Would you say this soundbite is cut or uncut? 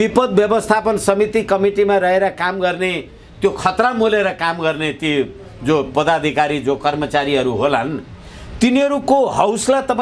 uncut